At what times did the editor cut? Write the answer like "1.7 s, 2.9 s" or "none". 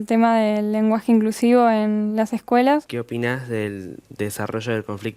3.0 s